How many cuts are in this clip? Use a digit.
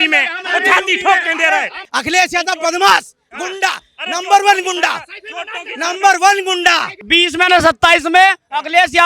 2